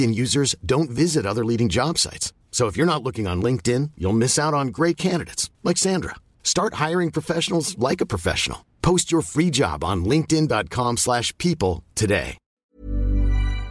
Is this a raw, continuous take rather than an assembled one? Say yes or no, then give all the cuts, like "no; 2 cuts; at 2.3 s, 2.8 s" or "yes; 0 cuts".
no; 1 cut; at 12.7 s